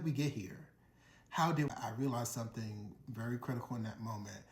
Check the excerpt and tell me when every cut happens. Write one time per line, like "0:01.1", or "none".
0:01.7